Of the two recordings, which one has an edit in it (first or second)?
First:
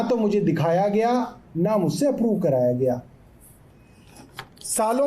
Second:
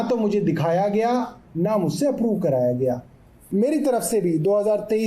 second